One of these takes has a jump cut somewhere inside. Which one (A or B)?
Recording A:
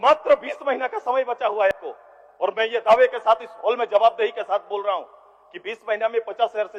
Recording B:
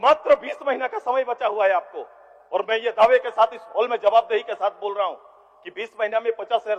A